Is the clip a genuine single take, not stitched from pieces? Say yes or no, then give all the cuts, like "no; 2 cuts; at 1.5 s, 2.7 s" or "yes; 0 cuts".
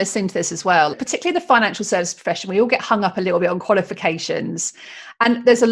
no; 1 cut; at 0.9 s